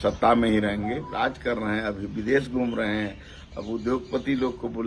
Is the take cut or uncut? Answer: cut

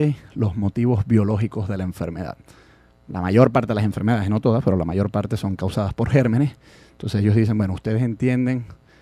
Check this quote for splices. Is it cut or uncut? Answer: cut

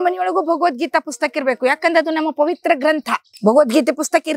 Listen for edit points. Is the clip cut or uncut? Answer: cut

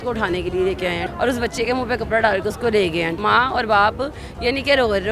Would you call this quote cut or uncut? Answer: cut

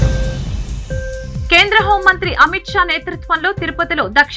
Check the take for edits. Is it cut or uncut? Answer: cut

